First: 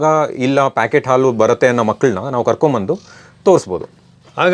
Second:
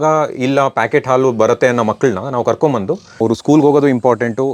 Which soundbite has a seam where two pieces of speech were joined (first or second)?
second